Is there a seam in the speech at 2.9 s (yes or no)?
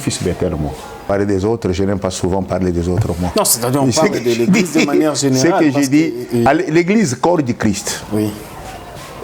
no